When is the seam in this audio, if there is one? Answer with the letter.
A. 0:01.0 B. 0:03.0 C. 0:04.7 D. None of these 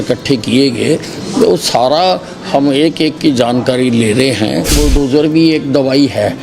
C